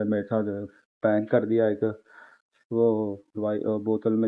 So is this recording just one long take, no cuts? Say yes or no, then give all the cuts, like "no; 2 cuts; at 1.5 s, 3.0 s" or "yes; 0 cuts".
yes; 0 cuts